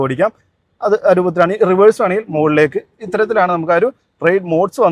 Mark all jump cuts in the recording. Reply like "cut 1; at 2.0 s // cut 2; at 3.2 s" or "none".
none